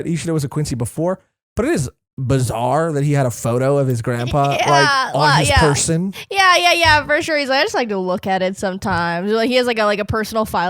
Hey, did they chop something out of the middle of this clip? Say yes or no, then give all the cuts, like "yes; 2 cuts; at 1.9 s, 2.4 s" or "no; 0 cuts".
no; 0 cuts